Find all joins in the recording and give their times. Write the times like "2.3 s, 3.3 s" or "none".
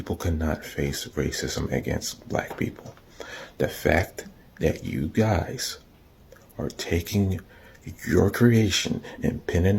none